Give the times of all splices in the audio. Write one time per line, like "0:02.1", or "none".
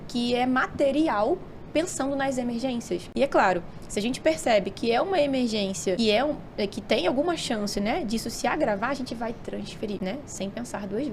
0:03.1
0:06.0
0:10.0